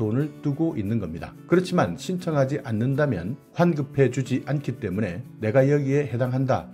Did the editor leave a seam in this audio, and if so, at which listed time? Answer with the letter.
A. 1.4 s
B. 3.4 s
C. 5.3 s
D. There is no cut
C